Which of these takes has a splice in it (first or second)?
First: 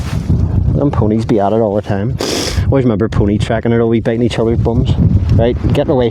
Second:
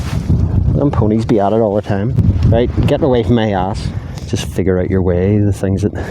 second